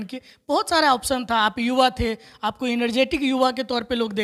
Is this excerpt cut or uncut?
uncut